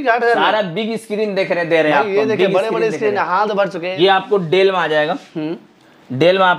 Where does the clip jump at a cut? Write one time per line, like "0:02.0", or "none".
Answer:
0:03.8